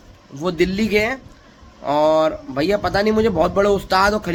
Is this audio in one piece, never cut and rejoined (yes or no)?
yes